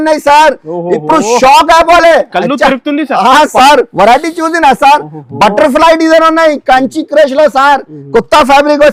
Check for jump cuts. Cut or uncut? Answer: uncut